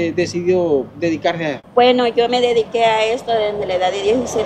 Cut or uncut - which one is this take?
cut